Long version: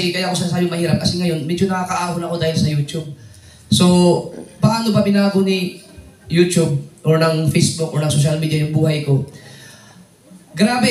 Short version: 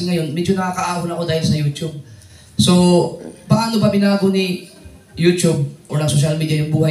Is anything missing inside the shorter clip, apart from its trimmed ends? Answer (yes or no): yes